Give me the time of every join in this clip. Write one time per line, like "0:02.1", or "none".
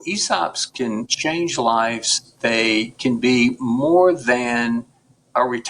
0:01.1